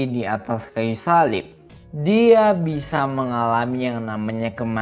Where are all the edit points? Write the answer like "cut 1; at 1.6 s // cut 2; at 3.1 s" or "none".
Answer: cut 1; at 1.5 s